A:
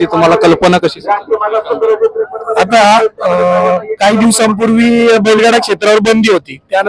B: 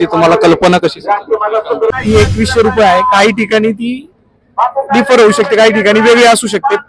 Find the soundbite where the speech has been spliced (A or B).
B